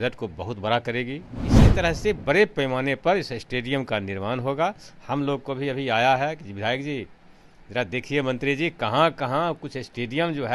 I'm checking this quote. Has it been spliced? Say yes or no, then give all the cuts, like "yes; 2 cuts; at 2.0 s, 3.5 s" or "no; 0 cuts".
yes; 1 cut; at 1.4 s